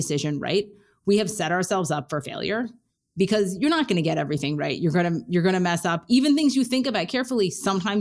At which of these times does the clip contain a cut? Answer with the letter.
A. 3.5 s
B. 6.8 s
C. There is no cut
C